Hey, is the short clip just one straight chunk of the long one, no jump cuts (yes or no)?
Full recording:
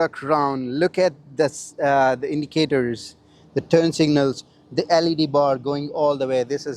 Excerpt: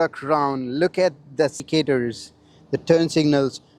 no